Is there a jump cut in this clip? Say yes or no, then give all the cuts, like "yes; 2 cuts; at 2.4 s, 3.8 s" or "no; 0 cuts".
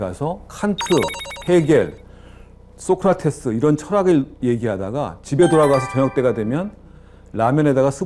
no; 0 cuts